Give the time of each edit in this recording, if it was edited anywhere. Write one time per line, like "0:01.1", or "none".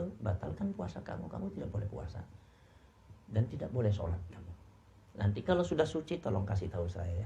none

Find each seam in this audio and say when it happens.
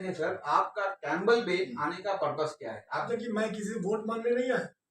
0:03.1

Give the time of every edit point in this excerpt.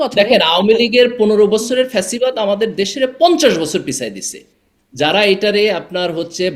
none

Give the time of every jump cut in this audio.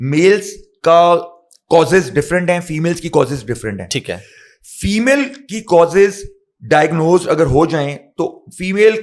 none

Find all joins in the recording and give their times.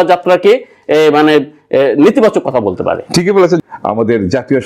0:03.6

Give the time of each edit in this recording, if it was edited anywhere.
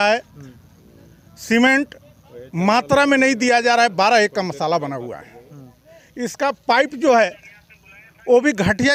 none

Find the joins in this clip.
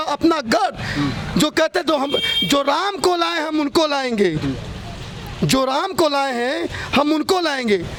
none

